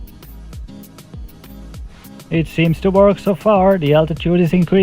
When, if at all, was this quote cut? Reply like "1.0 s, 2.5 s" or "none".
1.0 s